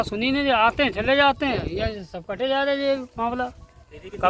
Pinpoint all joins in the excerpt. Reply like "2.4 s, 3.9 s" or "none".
none

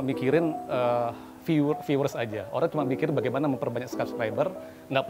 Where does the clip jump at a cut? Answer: none

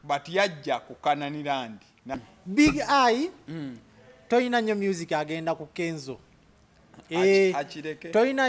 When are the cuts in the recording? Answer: 2.0 s

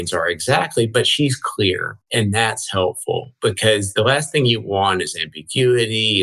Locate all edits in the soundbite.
1.9 s

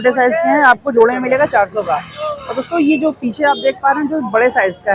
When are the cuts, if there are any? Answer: none

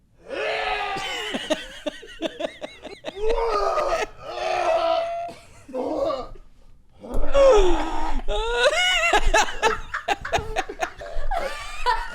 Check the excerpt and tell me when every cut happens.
3.1 s, 11.0 s

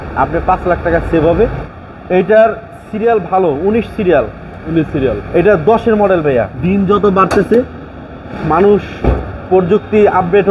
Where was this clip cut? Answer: 1.6 s, 6.6 s

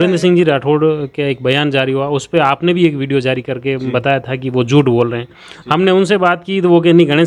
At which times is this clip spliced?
none

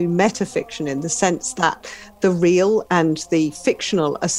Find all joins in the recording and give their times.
2.8 s

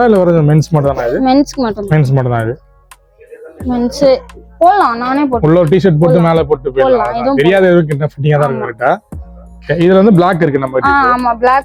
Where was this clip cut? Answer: none

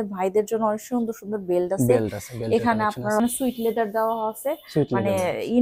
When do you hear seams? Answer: 3.2 s

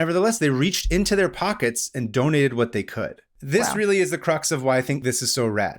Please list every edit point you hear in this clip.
3.3 s, 5.0 s

